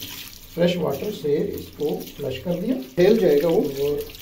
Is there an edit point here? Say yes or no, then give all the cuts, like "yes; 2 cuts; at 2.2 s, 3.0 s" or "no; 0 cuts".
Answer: yes; 1 cut; at 2.9 s